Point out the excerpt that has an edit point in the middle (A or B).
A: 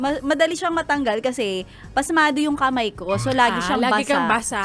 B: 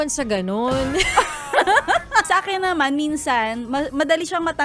B